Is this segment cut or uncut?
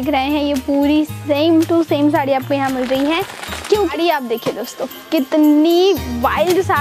cut